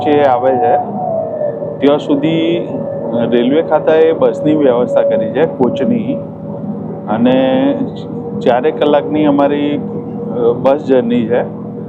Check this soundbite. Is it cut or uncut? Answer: uncut